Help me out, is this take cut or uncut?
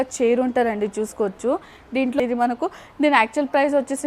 cut